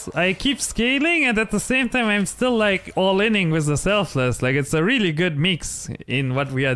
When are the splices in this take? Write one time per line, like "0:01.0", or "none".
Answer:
none